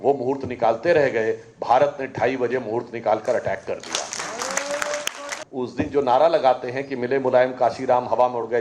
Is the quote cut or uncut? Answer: cut